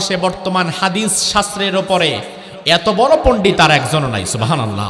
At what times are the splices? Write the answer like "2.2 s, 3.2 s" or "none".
none